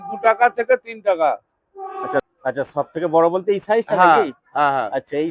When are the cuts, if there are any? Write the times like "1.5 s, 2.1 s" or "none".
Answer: 2.3 s